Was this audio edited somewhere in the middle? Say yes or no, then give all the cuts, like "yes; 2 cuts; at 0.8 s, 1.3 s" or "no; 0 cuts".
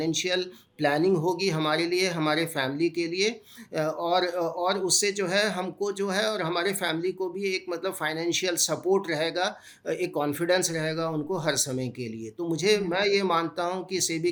no; 0 cuts